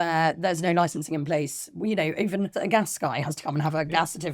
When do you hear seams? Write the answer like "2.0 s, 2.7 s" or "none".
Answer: 2.5 s

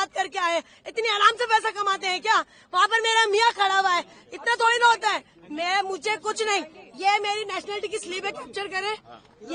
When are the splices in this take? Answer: none

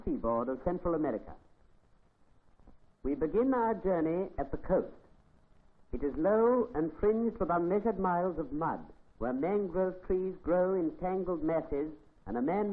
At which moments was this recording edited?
11.6 s

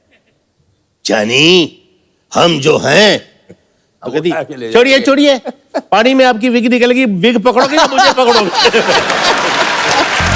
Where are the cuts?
none

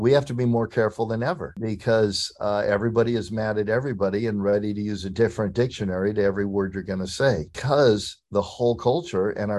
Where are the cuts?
1.5 s, 7.6 s

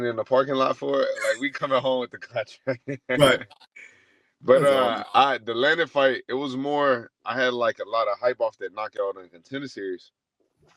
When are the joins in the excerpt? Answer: none

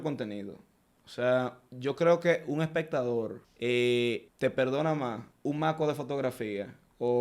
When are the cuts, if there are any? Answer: 3.4 s, 4.3 s, 5.3 s

